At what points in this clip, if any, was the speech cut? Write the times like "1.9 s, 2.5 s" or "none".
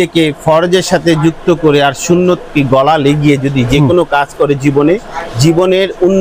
none